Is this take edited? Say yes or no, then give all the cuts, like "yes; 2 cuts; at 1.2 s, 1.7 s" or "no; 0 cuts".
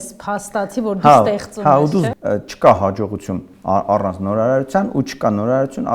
yes; 1 cut; at 2.1 s